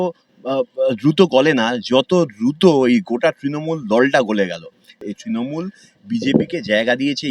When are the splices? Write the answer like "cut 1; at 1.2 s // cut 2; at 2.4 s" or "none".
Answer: cut 1; at 5.0 s